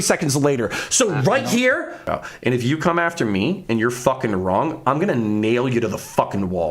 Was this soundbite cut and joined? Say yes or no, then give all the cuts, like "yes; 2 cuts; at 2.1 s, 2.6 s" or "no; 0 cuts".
yes; 1 cut; at 2.2 s